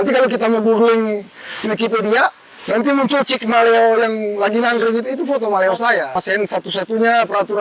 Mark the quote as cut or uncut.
cut